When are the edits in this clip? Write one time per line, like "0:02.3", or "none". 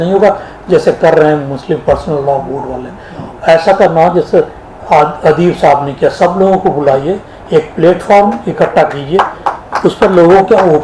none